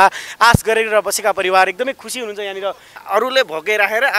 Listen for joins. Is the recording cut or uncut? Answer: cut